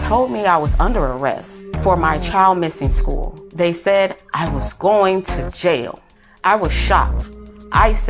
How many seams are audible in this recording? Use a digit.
0